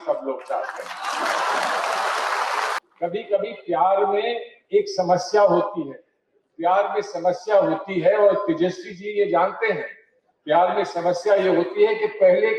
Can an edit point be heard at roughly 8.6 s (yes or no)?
no